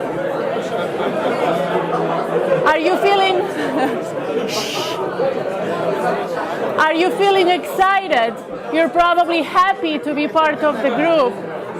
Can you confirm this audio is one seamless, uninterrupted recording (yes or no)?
no